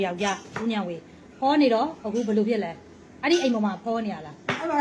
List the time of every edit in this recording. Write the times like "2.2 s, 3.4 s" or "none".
none